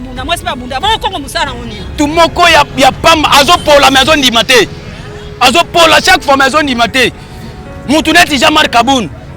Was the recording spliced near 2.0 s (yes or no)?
yes